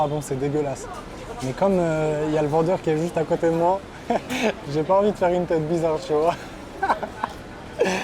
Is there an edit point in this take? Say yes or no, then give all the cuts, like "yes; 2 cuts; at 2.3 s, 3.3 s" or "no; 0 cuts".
no; 0 cuts